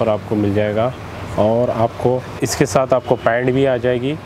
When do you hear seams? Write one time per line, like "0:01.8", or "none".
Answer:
none